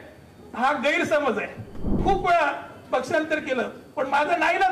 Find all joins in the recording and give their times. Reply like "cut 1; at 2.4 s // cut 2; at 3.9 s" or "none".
cut 1; at 1.9 s